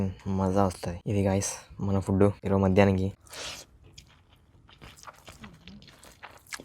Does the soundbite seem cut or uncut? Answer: cut